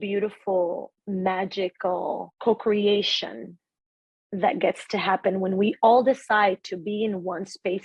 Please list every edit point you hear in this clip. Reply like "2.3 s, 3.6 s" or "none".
0.9 s, 2.3 s